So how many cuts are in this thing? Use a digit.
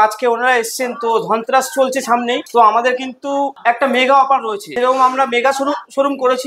0